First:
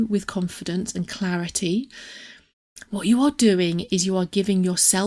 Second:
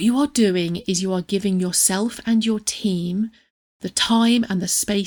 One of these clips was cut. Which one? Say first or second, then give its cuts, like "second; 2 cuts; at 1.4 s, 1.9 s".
first; 1 cut; at 2.1 s